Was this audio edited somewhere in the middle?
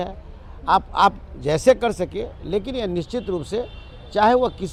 no; 0 cuts

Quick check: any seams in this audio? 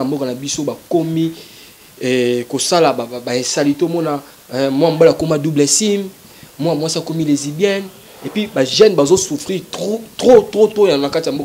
no; 0 cuts

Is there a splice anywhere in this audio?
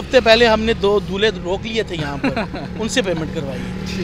no; 0 cuts

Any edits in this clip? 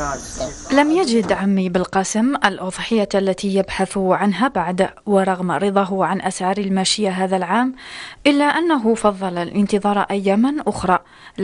no; 0 cuts

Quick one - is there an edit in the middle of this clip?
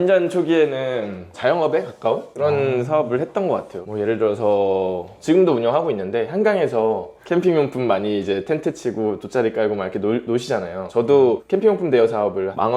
no; 0 cuts

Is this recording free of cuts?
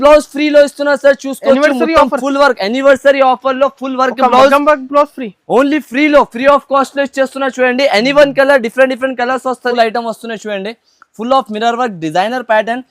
no; 1 cut; at 9.7 s

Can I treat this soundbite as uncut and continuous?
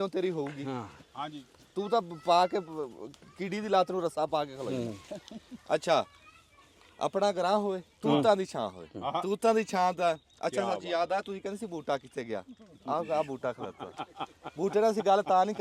yes; 0 cuts

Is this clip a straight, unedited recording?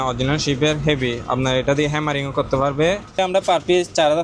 no; 1 cut; at 3.1 s

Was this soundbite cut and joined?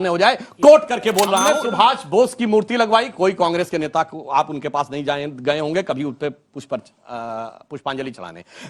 yes; 1 cut; at 1.5 s

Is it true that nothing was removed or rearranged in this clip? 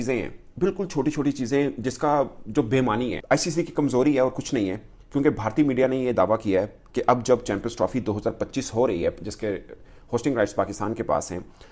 no; 1 cut; at 3.2 s

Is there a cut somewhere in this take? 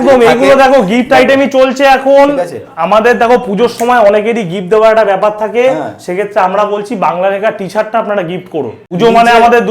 yes; 1 cut; at 8.8 s

